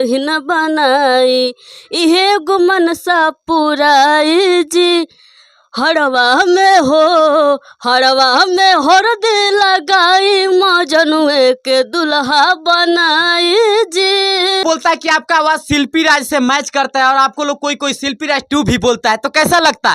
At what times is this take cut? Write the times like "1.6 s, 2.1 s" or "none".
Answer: 14.6 s